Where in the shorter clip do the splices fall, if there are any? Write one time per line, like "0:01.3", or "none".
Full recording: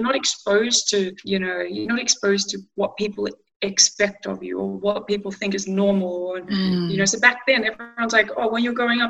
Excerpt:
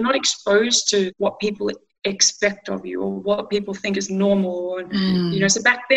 0:01.1